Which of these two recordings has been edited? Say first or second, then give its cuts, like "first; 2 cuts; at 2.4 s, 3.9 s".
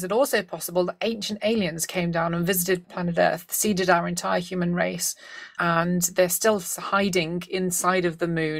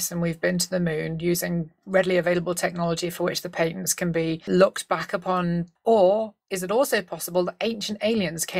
second; 1 cut; at 5.7 s